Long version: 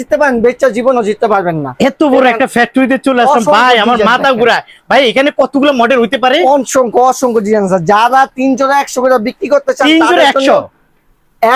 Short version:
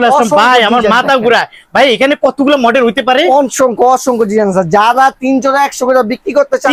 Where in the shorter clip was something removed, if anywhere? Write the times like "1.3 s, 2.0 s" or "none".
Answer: none